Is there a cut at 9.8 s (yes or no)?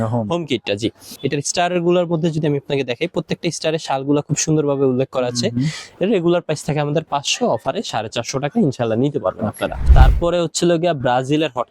yes